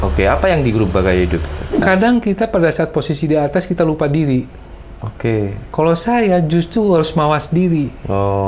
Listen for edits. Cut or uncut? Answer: cut